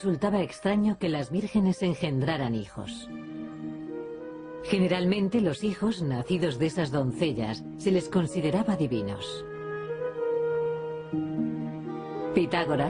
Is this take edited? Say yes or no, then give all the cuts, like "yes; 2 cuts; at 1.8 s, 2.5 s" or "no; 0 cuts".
no; 0 cuts